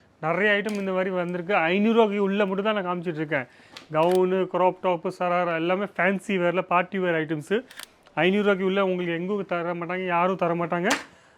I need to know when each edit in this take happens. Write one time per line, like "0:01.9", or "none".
none